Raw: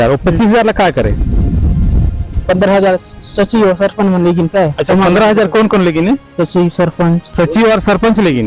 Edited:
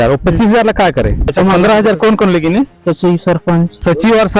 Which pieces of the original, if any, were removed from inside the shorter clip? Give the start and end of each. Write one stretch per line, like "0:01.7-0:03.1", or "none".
0:01.2-0:04.8